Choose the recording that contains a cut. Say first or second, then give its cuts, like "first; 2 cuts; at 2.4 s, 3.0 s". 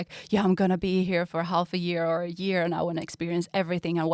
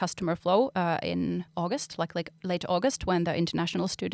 second; 1 cut; at 1.5 s